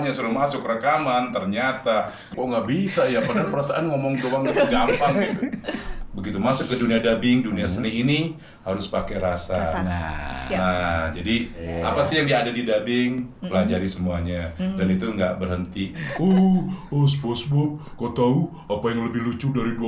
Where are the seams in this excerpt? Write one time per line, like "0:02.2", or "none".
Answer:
0:02.3
0:05.9
0:11.7
0:16.0